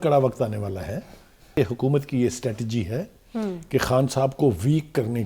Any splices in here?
yes; 1 cut; at 1.5 s

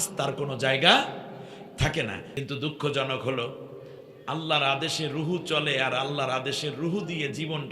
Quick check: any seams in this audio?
yes; 1 cut; at 2.4 s

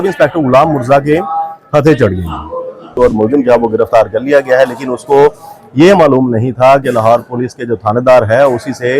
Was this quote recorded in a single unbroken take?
no; 1 cut; at 3.0 s

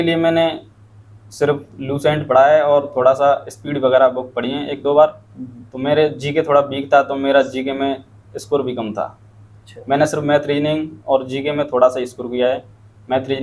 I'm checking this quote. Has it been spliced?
no; 0 cuts

